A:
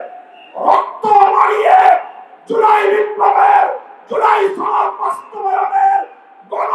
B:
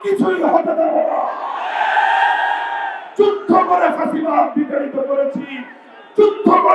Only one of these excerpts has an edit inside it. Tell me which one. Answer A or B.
B